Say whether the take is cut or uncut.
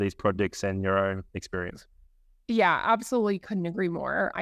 cut